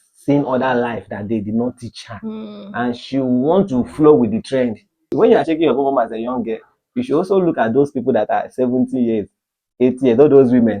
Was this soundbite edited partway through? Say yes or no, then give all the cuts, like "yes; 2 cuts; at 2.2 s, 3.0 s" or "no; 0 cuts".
yes; 1 cut; at 5.0 s